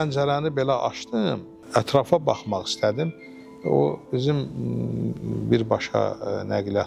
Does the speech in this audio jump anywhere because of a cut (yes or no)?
no